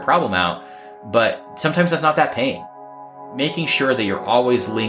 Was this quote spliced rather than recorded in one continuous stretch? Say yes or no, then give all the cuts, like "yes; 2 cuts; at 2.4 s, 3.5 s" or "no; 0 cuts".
yes; 2 cuts; at 1.5 s, 3.1 s